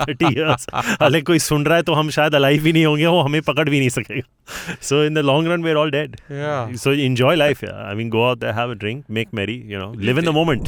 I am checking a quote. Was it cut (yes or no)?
no